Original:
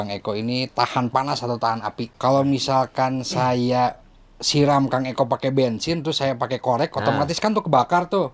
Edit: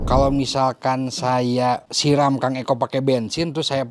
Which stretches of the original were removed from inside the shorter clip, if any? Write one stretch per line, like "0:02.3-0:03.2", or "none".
0:04.0-0:04.4